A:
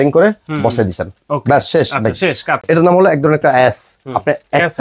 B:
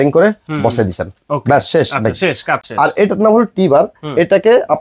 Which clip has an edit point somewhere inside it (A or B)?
A